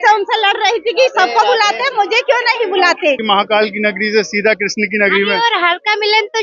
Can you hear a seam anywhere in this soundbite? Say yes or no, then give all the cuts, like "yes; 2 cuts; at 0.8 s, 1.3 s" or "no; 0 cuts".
yes; 1 cut; at 3.2 s